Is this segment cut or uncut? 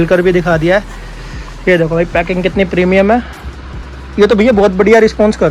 uncut